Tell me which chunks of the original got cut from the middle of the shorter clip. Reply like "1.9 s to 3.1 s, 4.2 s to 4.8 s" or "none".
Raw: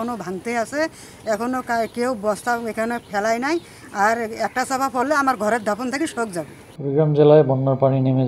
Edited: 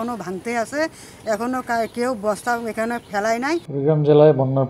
3.7 s to 6.8 s